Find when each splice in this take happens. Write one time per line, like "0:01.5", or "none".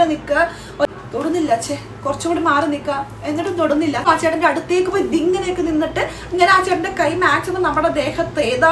0:00.9
0:04.1